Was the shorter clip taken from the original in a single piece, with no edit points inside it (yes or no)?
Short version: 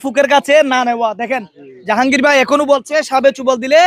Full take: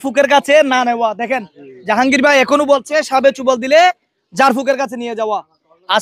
yes